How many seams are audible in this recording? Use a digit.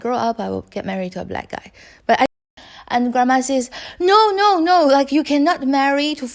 1